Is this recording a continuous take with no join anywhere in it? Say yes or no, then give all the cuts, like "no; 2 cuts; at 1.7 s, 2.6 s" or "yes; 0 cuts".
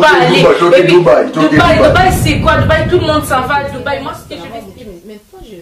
no; 1 cut; at 4.1 s